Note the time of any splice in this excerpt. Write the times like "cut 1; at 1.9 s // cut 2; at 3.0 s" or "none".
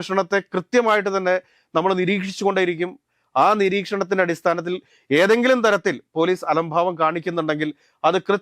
none